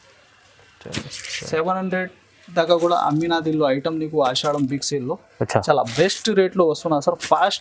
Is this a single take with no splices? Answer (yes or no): yes